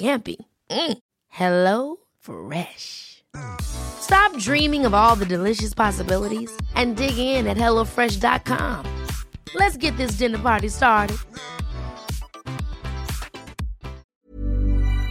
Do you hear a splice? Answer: yes; 1 cut; at 14.0 s

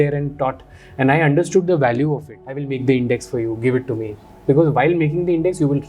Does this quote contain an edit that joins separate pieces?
yes; 1 cut; at 2.7 s

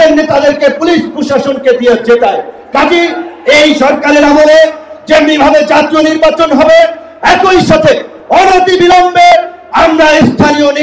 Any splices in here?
no; 0 cuts

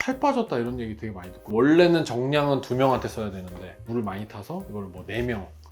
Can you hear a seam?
yes; 1 cut; at 1.4 s

